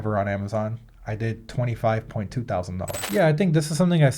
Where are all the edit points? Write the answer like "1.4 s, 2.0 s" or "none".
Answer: 3.0 s